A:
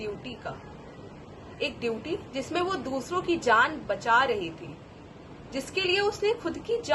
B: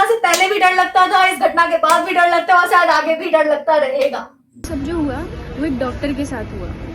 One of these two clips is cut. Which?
B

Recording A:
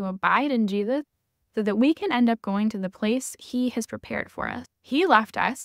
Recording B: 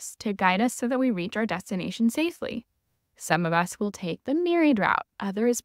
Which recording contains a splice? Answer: A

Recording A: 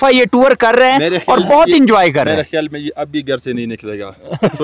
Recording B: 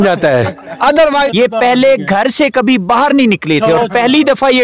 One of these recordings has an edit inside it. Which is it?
B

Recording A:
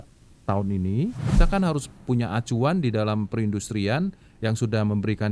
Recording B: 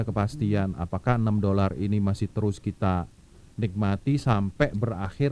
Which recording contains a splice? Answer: A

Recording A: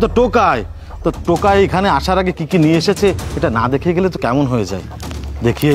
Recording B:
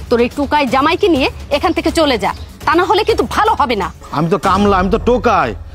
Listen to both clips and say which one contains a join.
B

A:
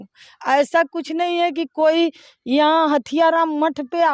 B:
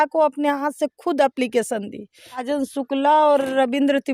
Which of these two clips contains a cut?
B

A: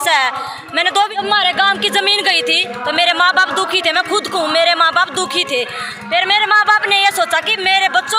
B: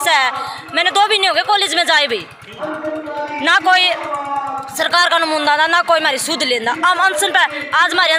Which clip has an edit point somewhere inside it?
A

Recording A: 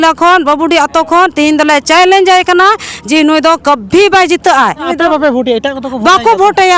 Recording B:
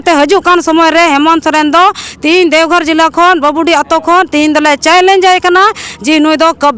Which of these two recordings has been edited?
A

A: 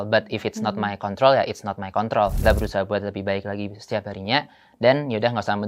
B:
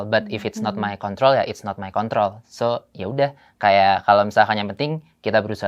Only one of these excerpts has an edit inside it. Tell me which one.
A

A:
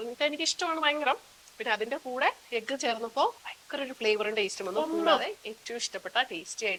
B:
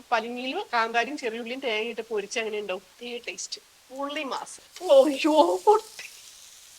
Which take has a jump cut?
B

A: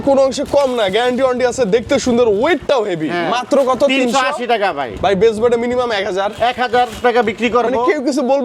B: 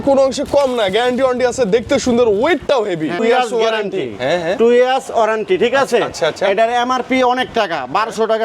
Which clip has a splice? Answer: B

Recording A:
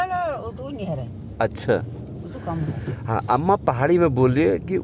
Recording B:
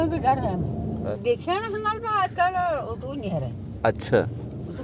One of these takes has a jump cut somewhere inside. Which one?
B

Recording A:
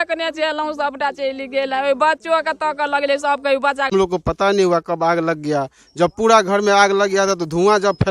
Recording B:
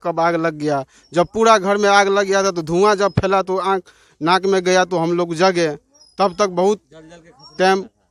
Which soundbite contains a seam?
A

